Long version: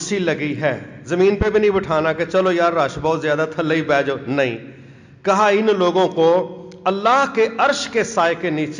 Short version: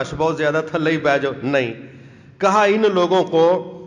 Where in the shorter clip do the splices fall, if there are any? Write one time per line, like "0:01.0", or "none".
none